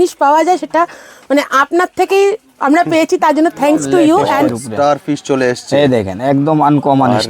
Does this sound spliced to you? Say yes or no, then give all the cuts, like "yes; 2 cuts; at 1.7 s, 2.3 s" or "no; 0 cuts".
yes; 1 cut; at 4.5 s